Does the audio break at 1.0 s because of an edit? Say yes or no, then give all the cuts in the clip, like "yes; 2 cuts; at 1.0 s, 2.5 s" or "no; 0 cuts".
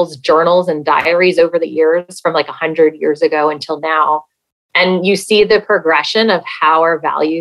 yes; 1 cut; at 1.0 s